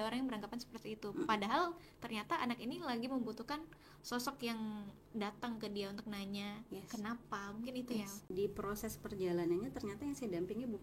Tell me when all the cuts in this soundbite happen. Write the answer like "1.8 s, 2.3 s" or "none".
8.3 s